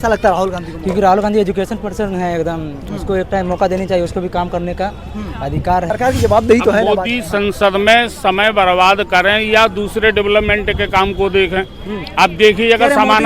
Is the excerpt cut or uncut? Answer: cut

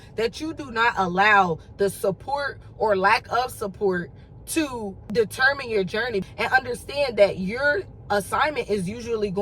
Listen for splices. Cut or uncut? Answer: cut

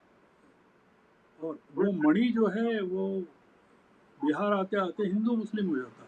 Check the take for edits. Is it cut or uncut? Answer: uncut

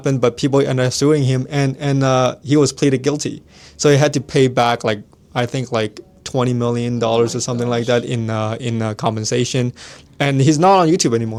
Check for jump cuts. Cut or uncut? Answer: uncut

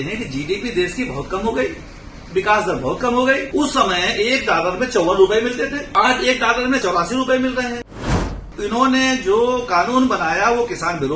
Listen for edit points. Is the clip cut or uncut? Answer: cut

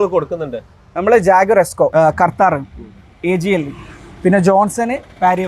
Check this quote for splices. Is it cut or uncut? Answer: cut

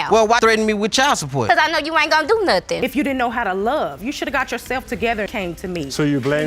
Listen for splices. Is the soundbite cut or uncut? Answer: cut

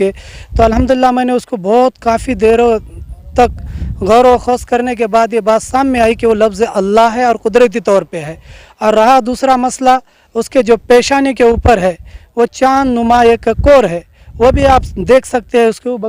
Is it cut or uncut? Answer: uncut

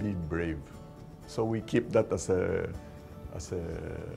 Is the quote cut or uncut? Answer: uncut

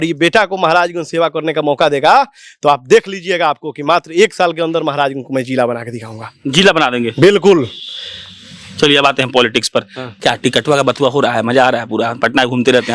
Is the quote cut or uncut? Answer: uncut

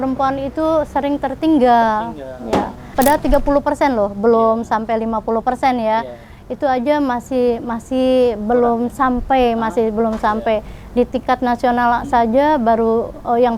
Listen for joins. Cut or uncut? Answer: cut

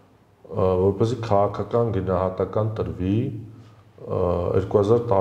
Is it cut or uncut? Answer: uncut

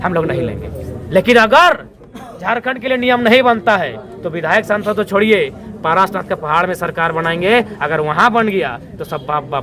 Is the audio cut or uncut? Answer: uncut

